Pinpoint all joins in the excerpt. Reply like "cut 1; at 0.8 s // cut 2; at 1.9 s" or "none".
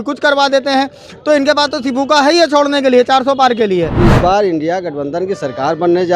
cut 1; at 4.0 s